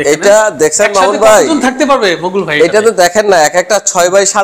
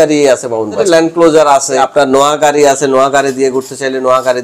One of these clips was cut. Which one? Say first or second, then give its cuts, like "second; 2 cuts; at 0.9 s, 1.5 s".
second; 2 cuts; at 0.8 s, 1.8 s